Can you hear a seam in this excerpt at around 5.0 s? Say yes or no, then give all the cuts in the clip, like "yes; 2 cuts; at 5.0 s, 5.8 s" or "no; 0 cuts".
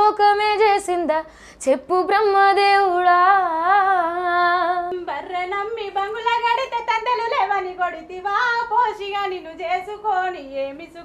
yes; 1 cut; at 5.0 s